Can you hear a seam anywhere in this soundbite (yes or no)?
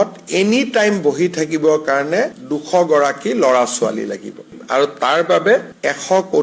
yes